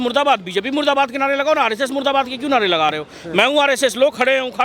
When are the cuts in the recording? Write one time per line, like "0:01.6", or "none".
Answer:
none